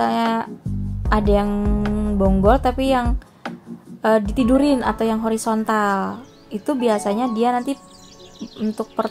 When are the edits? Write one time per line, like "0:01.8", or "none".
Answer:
none